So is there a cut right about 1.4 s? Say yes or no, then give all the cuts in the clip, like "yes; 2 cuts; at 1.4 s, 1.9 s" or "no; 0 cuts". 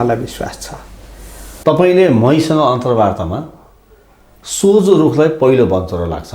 yes; 1 cut; at 1.4 s